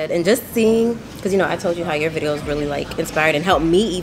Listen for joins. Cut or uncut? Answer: uncut